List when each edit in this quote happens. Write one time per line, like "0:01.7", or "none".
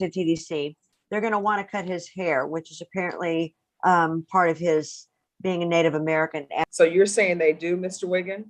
0:06.7

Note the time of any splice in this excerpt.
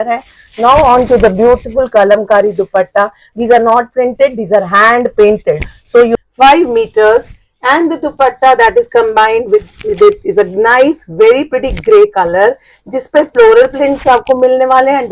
0:06.1

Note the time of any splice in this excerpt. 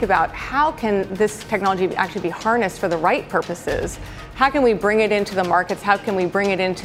none

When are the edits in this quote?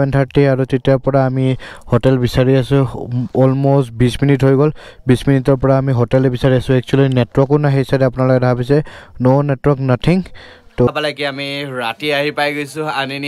0:10.9

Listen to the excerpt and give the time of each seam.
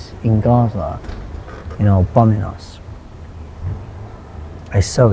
none

